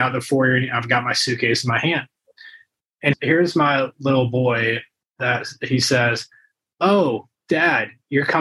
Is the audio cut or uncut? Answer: uncut